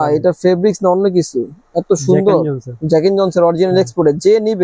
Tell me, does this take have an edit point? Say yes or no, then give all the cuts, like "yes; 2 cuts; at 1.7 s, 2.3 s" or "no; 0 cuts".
no; 0 cuts